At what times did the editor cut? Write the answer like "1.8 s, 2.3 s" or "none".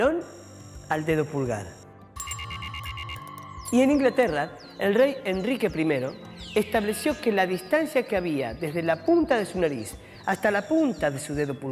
10.8 s